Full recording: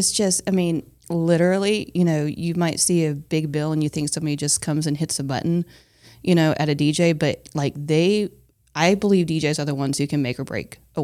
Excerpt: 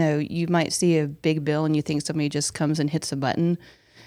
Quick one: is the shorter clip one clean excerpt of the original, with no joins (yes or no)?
yes